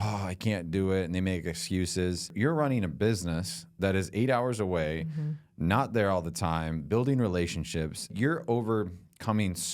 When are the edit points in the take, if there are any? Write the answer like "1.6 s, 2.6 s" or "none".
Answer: 2.3 s, 8.1 s